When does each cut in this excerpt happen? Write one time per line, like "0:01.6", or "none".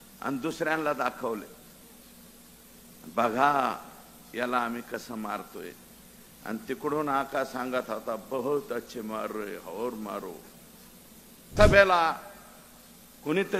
0:11.5